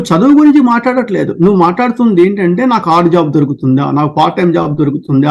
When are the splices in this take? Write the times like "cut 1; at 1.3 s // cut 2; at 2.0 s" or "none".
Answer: none